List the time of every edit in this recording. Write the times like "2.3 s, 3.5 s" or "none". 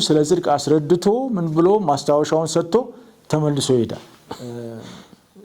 4.4 s

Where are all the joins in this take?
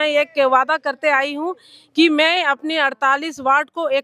none

